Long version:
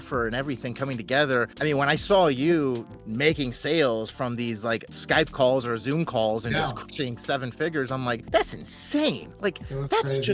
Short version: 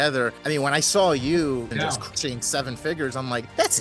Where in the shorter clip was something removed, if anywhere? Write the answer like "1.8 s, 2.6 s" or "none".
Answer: 1.7 s